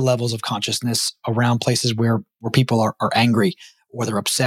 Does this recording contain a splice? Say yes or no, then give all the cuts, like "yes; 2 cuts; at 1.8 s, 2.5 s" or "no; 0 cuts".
no; 0 cuts